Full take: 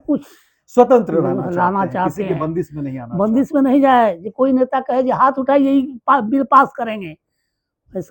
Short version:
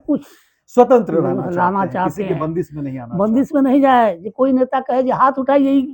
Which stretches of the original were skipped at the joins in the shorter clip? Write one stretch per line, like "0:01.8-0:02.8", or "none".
none